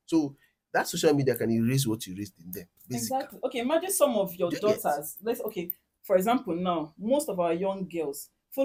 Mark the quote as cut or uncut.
uncut